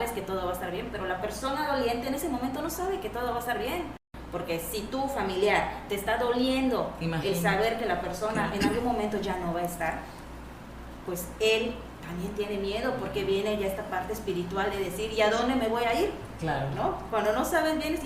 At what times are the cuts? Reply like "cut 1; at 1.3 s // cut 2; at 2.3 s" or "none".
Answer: cut 1; at 4.1 s

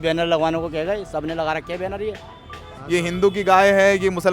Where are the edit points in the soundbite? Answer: cut 1; at 2.7 s

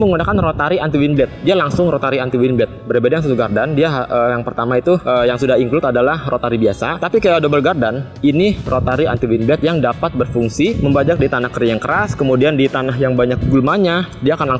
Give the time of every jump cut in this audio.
none

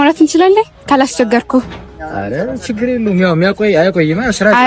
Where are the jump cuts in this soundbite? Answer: none

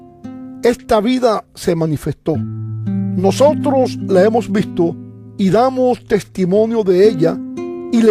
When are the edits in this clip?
none

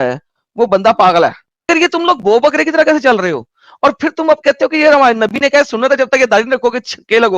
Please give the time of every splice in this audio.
cut 1; at 1.7 s

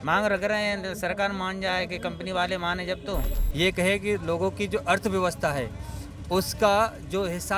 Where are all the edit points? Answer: cut 1; at 3.4 s

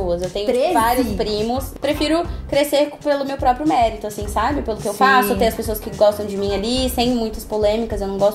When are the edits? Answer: cut 1; at 1.7 s

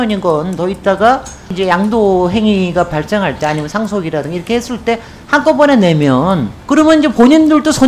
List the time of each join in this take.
cut 1; at 1.5 s // cut 2; at 6.5 s

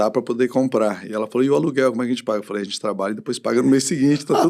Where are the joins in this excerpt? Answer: none

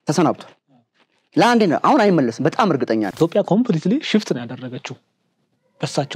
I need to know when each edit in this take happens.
cut 1; at 3.1 s

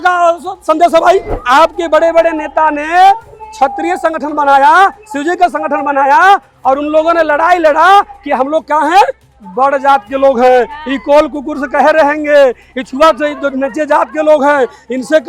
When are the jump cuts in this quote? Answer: cut 1; at 1.3 s

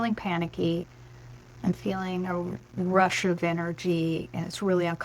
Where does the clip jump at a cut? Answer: none

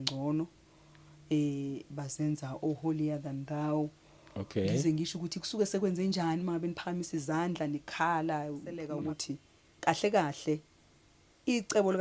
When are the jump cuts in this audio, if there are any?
cut 1; at 8.9 s

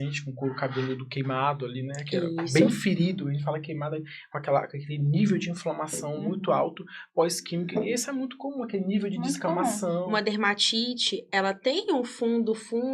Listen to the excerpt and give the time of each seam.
cut 1; at 10.1 s

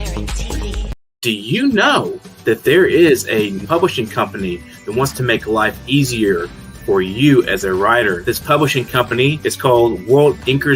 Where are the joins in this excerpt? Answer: cut 1; at 0.9 s

